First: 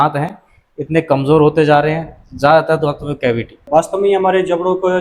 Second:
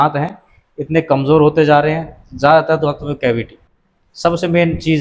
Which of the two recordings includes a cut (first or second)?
first